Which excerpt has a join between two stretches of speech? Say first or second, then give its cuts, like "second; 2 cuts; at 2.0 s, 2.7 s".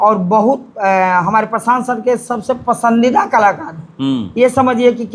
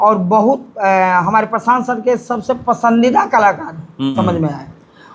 second; 1 cut; at 4.1 s